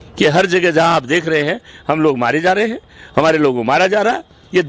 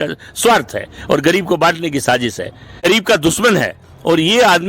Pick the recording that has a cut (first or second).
second